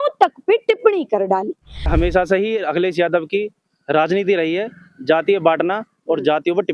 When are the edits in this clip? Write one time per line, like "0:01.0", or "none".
0:01.9